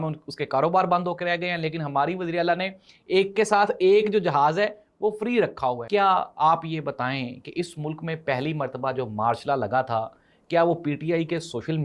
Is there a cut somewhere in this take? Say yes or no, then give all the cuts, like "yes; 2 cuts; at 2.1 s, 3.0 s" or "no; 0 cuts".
yes; 1 cut; at 5.8 s